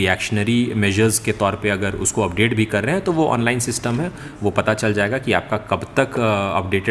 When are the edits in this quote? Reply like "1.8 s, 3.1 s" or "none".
none